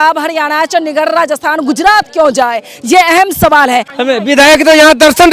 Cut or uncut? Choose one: cut